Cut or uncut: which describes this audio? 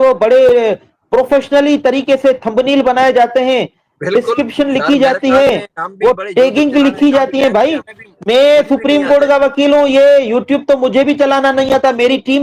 uncut